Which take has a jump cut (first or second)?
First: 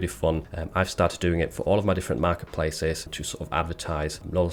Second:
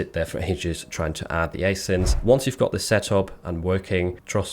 second